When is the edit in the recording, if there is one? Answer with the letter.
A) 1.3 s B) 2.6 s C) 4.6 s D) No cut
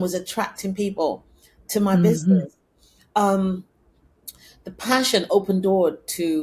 D